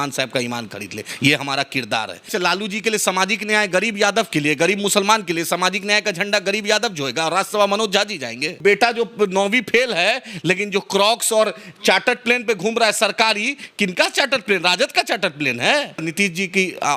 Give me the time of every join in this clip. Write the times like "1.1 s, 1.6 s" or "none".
2.3 s, 8.6 s, 16.1 s